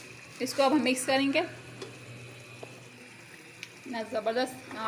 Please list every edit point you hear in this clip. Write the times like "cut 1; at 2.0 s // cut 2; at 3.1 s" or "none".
cut 1; at 2.9 s